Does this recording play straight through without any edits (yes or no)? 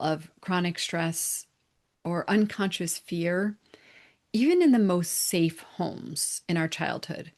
yes